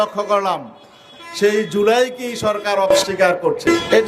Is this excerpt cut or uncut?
cut